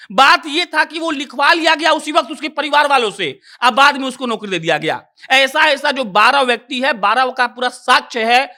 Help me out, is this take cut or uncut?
uncut